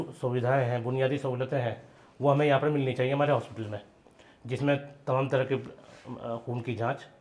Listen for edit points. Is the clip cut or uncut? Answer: uncut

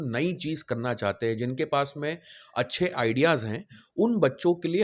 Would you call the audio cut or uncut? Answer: uncut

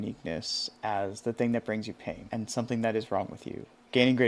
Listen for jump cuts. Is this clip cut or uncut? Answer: cut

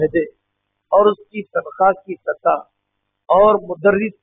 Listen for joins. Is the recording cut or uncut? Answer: uncut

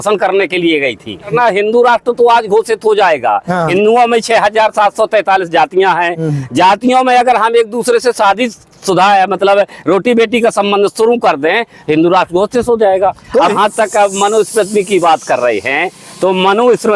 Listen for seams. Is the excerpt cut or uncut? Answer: cut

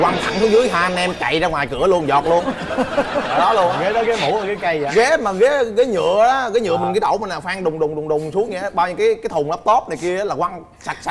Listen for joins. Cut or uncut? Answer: uncut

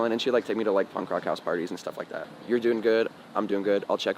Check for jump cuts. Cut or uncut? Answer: cut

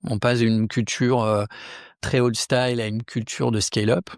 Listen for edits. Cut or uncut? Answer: cut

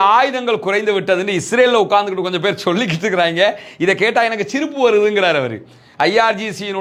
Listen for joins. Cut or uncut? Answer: uncut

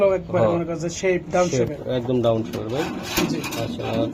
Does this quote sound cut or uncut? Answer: uncut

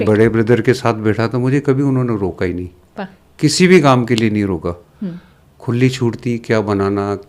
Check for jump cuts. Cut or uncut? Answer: uncut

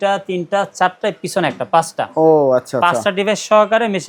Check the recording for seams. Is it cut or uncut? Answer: uncut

